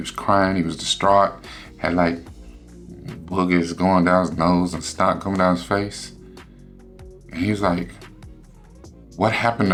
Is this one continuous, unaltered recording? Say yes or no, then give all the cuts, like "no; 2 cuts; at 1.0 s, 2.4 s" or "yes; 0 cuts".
yes; 0 cuts